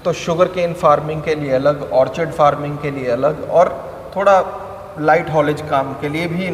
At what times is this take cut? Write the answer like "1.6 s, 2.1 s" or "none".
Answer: none